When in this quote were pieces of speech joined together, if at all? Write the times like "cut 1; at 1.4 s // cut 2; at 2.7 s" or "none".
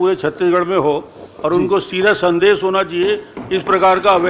none